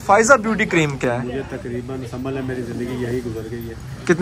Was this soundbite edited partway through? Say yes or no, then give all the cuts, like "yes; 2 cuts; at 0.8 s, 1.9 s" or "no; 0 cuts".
yes; 1 cut; at 1.0 s